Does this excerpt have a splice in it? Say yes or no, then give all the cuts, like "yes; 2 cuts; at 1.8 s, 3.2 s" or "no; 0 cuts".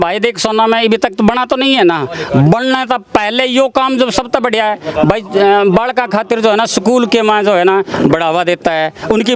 no; 0 cuts